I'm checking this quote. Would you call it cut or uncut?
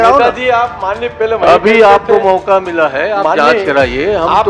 uncut